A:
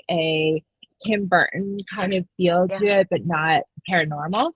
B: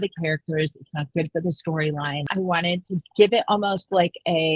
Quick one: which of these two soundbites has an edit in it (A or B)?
B